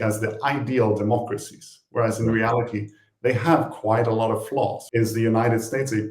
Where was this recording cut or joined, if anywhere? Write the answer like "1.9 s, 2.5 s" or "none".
4.8 s